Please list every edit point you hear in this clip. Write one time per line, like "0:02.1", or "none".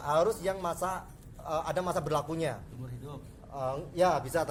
none